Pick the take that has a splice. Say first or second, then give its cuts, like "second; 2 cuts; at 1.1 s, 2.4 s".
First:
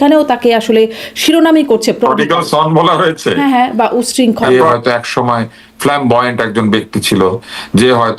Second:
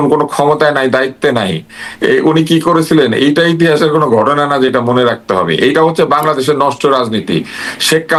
first; 1 cut; at 4.5 s